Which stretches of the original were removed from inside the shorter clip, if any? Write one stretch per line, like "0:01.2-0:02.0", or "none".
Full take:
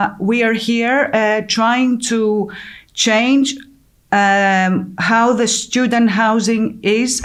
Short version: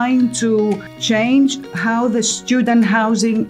0:02.6-0:02.9
0:03.7-0:05.0